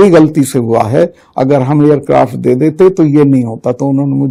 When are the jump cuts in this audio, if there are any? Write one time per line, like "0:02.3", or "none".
none